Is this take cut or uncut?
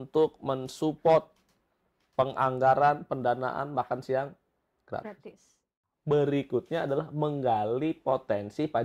cut